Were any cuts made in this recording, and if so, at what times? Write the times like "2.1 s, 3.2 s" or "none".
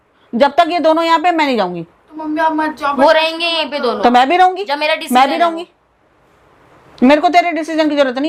none